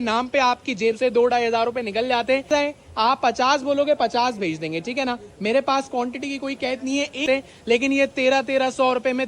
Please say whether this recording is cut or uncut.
cut